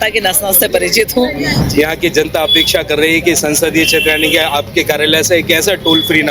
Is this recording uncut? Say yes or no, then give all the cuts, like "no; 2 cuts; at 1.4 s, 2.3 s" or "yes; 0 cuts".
no; 1 cut; at 1.6 s